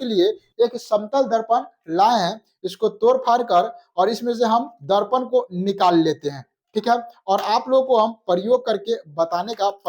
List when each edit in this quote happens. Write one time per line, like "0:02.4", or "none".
none